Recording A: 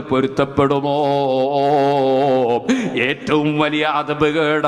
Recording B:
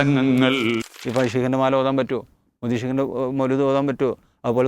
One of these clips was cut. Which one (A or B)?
B